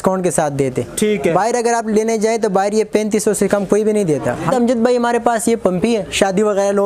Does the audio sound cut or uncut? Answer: cut